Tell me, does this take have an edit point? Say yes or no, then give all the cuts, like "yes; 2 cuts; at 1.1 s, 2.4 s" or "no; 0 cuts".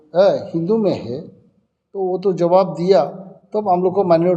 no; 0 cuts